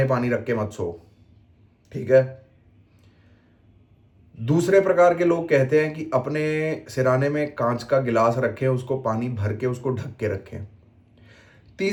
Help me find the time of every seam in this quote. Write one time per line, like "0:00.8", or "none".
none